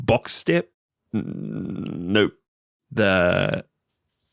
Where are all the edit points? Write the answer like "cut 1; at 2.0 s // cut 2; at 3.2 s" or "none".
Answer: none

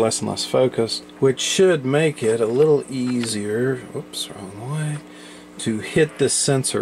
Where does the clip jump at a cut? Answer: cut 1; at 1.0 s

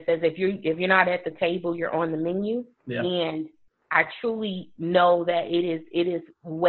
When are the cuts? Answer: cut 1; at 2.8 s

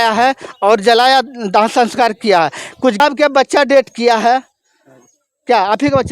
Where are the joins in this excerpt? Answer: cut 1; at 3.0 s

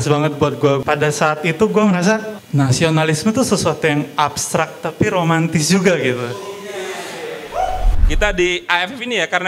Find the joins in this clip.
cut 1; at 0.8 s // cut 2; at 2.4 s // cut 3; at 7.9 s

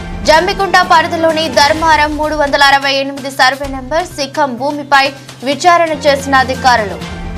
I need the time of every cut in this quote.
none

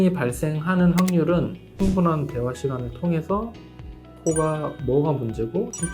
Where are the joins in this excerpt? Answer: cut 1; at 1.7 s

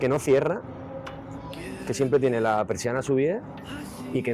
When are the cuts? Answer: none

